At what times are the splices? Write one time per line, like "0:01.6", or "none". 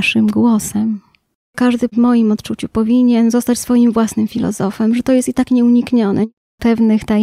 0:01.7
0:06.4